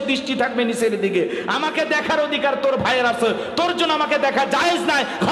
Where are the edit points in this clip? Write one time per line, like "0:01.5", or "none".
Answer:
none